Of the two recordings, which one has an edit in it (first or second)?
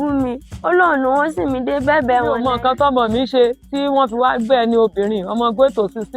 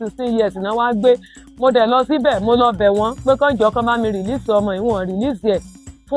first